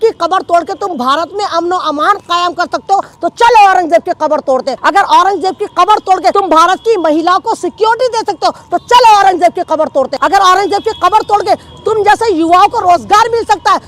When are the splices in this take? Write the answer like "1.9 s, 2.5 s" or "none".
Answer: 4.7 s, 6.3 s, 10.1 s